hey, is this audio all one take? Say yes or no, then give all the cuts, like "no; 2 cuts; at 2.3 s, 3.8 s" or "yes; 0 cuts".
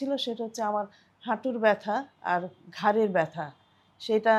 yes; 0 cuts